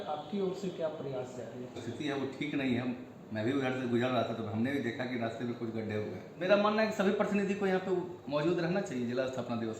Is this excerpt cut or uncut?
cut